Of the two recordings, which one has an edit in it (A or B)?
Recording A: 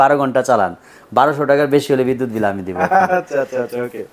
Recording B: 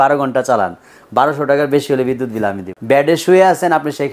B